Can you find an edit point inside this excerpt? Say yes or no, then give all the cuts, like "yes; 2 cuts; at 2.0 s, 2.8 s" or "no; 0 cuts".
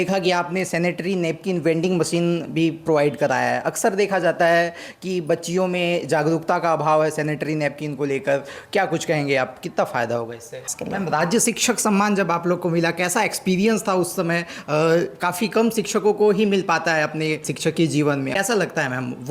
yes; 2 cuts; at 10.7 s, 18.3 s